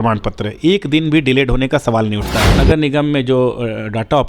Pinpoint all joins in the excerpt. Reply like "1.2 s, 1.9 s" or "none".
2.6 s